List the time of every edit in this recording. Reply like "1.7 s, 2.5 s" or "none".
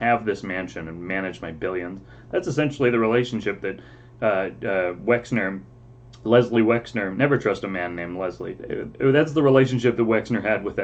8.6 s